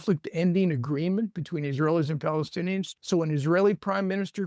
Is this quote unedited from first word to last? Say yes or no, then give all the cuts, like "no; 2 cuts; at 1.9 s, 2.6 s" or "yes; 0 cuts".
no; 1 cut; at 2.9 s